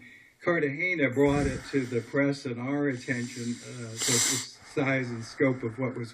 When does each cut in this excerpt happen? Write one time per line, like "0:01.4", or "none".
0:03.3